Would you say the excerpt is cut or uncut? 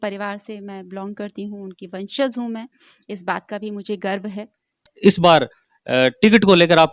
cut